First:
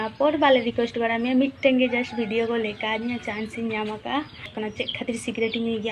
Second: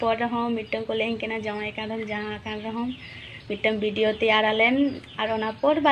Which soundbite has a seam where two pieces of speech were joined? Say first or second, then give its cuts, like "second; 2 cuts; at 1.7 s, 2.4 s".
first; 1 cut; at 4.5 s